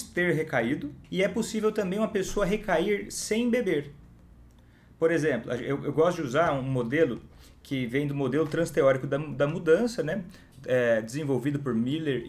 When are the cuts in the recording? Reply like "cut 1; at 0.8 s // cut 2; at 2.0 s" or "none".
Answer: cut 1; at 1.0 s